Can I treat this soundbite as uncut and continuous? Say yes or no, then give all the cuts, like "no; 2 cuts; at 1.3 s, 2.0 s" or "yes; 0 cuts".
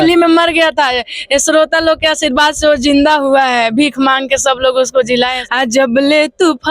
no; 1 cut; at 5.3 s